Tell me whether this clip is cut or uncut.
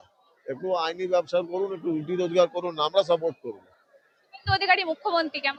uncut